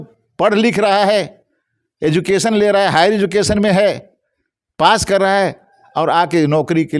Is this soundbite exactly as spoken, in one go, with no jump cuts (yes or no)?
yes